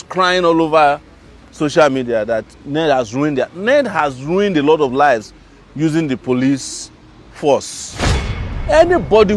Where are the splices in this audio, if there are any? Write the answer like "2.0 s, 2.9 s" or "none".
8.3 s